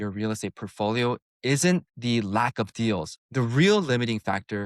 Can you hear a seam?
yes; 2 cuts; at 1.9 s, 3.2 s

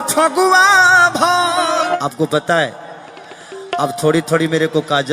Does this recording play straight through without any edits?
no; 1 cut; at 2.0 s

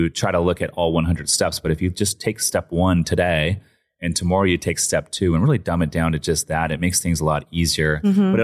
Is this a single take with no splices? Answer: yes; 0 cuts

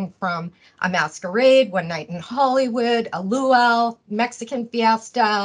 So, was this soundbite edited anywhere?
no; 0 cuts

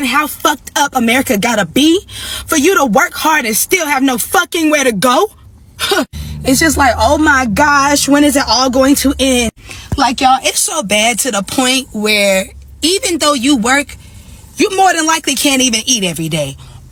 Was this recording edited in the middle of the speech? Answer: no; 0 cuts

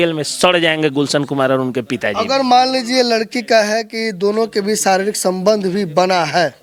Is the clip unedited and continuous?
yes; 0 cuts

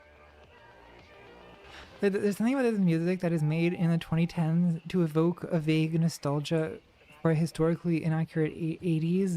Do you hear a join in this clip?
yes; 1 cut; at 1.8 s

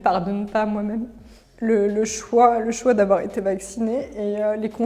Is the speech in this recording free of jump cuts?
yes; 0 cuts

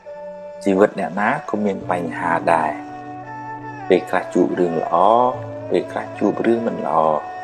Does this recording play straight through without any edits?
yes; 0 cuts

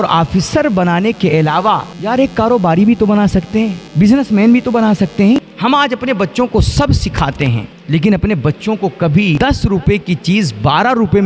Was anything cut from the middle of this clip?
yes; 5 cuts; at 1.9 s, 3.8 s, 5.4 s, 7.7 s, 9.4 s

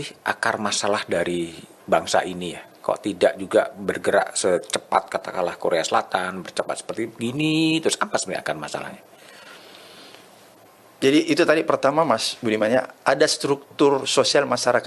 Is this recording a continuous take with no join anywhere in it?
yes; 0 cuts

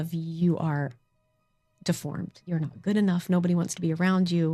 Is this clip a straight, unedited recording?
no; 1 cut; at 2.4 s

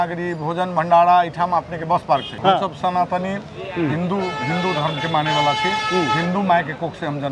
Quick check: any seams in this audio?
yes; 1 cut; at 2.3 s

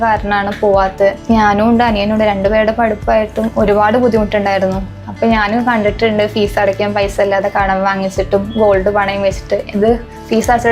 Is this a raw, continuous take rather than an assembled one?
no; 1 cut; at 1.2 s

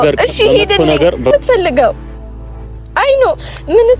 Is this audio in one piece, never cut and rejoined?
no; 1 cut; at 1.3 s

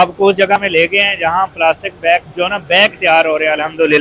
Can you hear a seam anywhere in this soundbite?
yes; 1 cut; at 2.3 s

